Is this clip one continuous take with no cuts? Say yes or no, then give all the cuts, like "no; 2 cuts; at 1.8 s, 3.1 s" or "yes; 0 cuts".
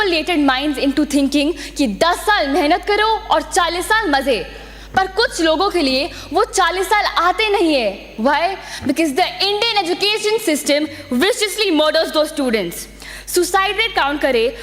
yes; 0 cuts